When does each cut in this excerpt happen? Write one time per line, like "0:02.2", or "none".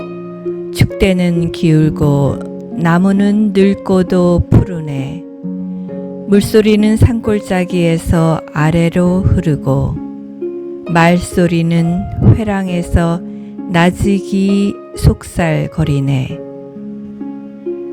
0:16.3